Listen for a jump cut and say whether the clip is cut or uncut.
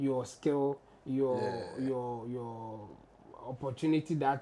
uncut